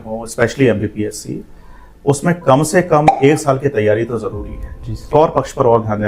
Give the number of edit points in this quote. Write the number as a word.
one